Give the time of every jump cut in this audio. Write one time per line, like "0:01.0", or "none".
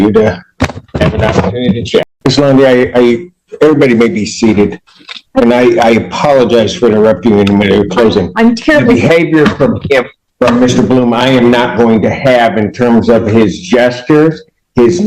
0:02.1